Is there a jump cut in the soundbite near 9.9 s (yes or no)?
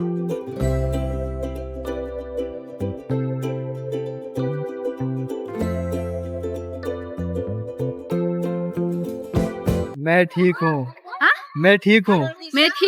yes